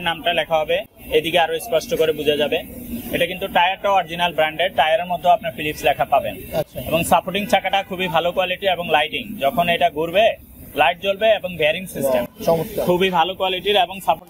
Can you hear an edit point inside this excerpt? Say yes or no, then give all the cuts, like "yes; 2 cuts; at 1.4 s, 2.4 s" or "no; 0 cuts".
no; 0 cuts